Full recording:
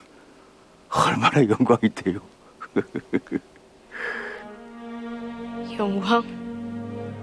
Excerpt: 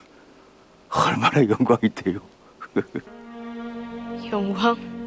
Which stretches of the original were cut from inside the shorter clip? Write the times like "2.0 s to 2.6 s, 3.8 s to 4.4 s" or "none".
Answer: 3.1 s to 4.5 s